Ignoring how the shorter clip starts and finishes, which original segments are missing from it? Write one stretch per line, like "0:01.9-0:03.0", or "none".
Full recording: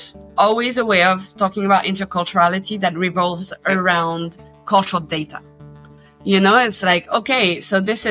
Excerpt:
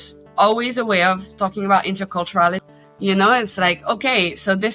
0:02.7-0:05.9